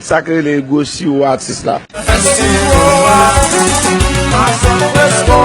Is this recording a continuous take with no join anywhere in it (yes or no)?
no